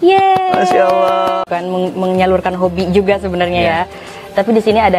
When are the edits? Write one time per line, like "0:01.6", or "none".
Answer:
0:01.4